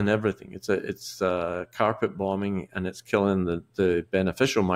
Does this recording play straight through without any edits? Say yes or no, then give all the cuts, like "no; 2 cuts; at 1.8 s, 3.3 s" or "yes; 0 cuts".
yes; 0 cuts